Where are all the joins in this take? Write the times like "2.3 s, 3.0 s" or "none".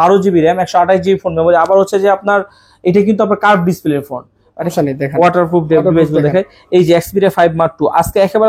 4.7 s